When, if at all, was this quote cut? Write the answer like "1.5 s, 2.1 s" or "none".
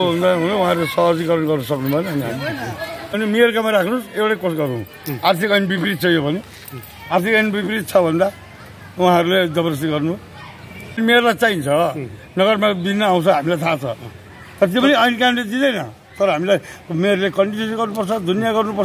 3.1 s, 11.0 s